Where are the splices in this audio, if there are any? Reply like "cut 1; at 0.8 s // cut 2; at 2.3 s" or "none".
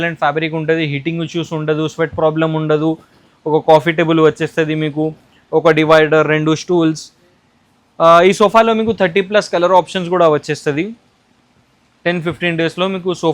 none